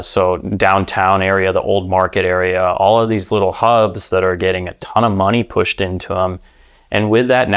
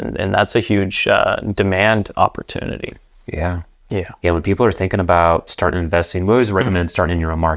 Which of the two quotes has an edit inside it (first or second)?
second